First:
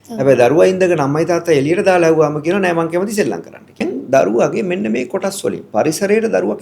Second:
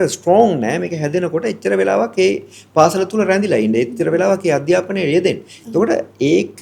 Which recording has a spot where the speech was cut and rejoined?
first; 1 cut; at 3.8 s

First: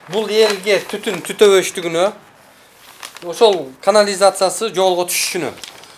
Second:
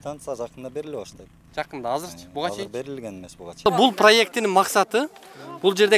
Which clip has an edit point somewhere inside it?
second; 1 cut; at 3.4 s

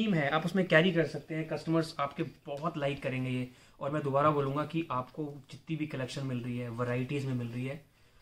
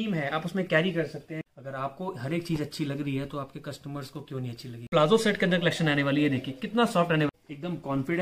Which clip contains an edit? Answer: second; 3 cuts; at 1.4 s, 4.9 s, 7.3 s

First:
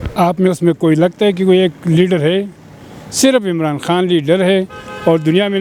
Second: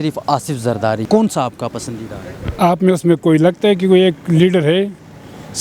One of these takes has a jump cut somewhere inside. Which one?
second; 1 cut; at 1.0 s

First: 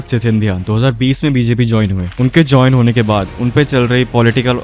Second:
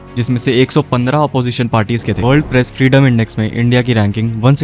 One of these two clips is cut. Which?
second; 1 cut; at 2.2 s

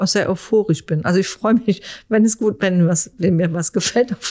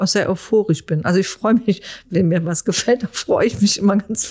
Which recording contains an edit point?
second; 1 cut; at 2.0 s

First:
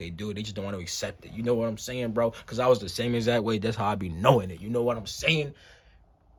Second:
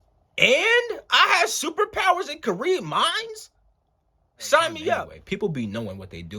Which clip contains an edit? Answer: second; 1 cut; at 5.1 s

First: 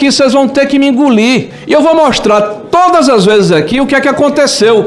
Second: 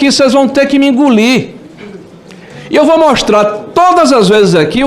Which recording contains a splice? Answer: first; 1 cut; at 1.5 s

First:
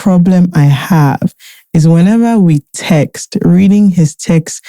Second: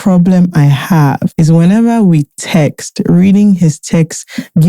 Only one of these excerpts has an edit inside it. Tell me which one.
second; 1 cut; at 1.3 s

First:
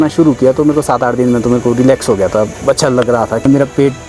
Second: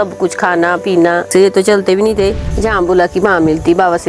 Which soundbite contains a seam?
second; 1 cut; at 2.5 s

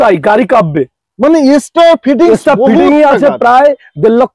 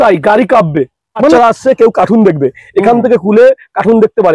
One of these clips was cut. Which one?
second; 1 cut; at 1.3 s

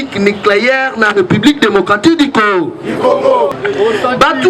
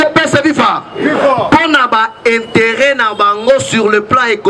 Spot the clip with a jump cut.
first; 1 cut; at 3.5 s

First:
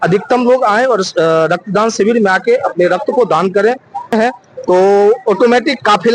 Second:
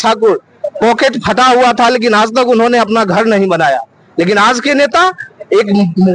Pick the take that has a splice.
first; 1 cut; at 4.1 s

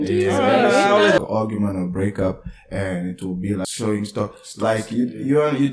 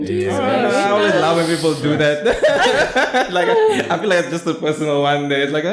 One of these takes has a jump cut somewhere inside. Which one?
first; 2 cuts; at 1.2 s, 3.7 s

